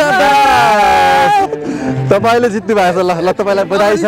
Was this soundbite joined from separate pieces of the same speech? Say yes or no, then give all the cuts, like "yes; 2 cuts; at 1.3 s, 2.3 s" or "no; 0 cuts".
yes; 1 cut; at 1.1 s